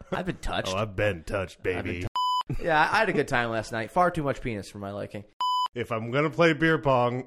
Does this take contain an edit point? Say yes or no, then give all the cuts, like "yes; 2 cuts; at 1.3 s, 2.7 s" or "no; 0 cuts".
yes; 2 cuts; at 2.0 s, 5.4 s